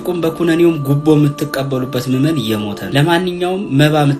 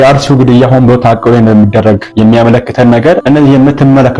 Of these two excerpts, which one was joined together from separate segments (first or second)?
first